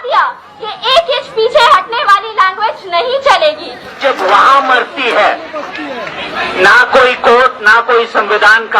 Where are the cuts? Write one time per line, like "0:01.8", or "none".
0:04.0